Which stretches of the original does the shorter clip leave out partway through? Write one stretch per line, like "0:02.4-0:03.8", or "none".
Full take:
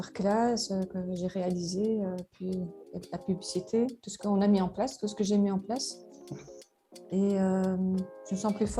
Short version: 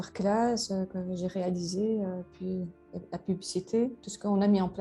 none

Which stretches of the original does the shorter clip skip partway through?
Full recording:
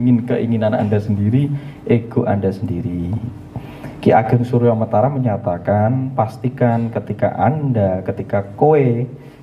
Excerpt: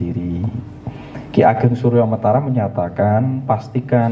none

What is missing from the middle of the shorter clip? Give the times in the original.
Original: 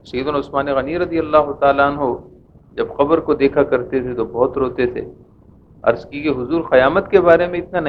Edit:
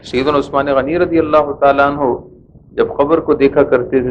none

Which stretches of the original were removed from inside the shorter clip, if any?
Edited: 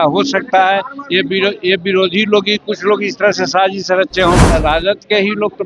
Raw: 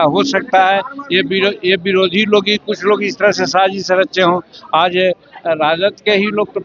0:04.4-0:05.4

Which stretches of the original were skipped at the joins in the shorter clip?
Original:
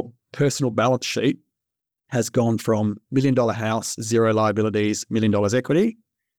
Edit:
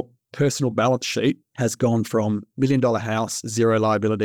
0:01.5-0:02.0

